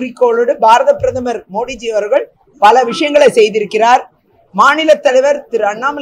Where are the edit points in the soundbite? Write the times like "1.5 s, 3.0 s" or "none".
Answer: none